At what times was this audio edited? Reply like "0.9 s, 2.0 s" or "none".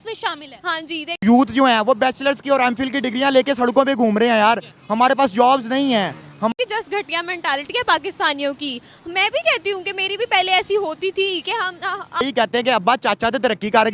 1.1 s, 6.5 s, 12.2 s